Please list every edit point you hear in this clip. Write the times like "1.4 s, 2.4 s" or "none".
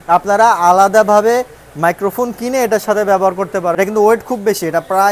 3.8 s